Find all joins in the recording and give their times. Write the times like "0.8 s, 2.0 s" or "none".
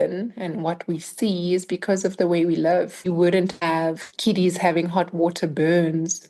3.0 s